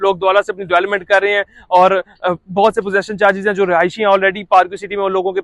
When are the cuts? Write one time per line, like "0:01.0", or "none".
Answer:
none